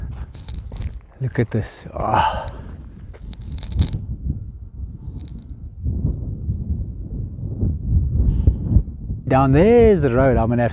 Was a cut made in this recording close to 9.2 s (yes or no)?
yes